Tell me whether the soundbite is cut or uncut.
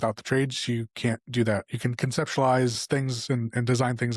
uncut